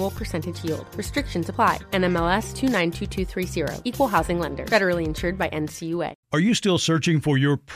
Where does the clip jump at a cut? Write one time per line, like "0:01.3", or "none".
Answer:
0:06.1